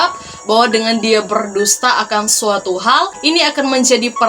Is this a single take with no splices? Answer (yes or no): no